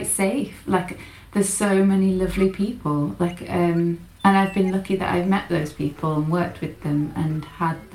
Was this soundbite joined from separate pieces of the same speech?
no; 0 cuts

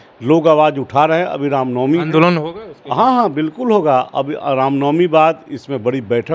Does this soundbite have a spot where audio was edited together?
no; 0 cuts

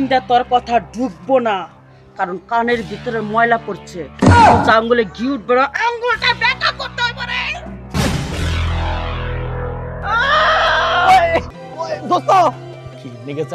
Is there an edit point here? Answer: no; 0 cuts

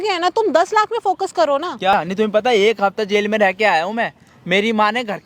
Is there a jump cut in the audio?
yes; 1 cut; at 1.9 s

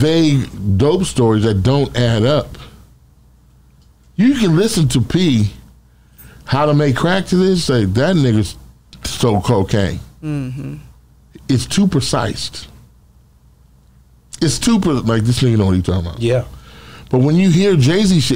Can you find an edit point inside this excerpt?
no; 0 cuts

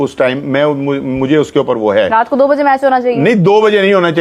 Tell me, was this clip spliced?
no; 0 cuts

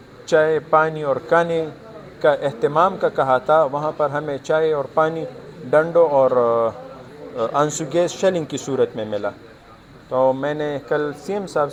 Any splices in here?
no; 0 cuts

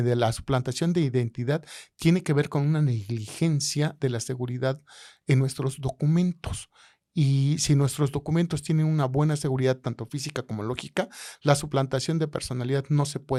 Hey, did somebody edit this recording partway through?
no; 0 cuts

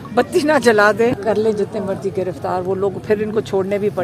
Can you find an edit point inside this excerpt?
yes; 1 cut; at 1.1 s

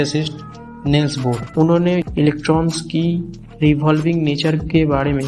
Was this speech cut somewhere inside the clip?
yes; 1 cut; at 1.4 s

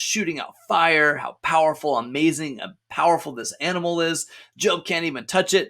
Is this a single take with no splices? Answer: yes; 0 cuts

